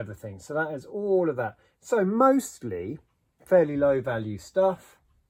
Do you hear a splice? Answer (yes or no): no